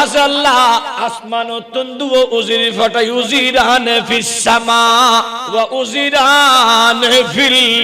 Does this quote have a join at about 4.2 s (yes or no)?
no